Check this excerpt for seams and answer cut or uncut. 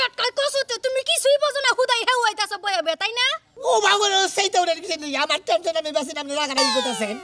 uncut